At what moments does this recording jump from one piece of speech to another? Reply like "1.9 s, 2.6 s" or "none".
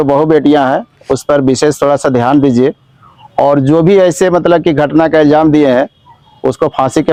none